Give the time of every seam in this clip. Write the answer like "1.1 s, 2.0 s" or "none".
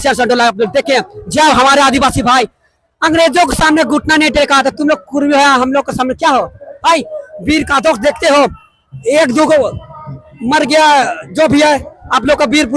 none